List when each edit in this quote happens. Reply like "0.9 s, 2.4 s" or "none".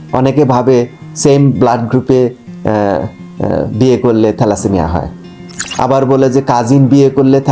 5.6 s